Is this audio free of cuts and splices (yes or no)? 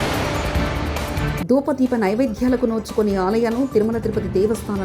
no